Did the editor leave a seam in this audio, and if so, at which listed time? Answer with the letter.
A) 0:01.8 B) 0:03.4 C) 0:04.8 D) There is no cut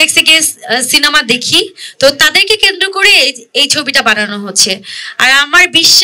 D